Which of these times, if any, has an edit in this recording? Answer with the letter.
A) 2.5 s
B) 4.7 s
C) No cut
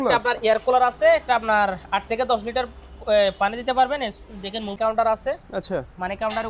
B